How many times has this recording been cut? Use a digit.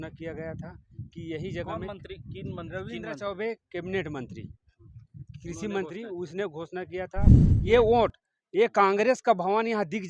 1